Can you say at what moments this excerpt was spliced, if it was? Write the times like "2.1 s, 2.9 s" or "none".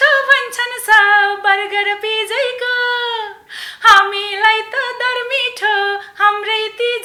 none